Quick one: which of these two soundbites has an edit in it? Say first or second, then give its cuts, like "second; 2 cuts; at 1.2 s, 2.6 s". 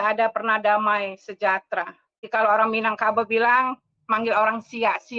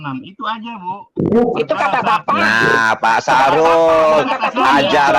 first; 1 cut; at 2.2 s